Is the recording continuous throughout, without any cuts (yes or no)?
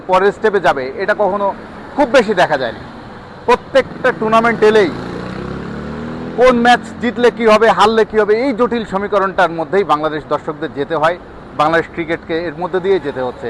yes